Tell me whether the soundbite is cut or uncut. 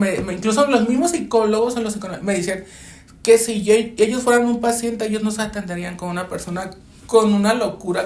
uncut